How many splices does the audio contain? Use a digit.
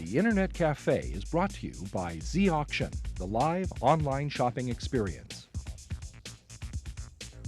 1